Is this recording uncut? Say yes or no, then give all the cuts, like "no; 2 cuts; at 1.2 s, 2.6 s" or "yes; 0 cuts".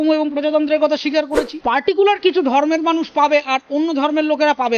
no; 1 cut; at 1.5 s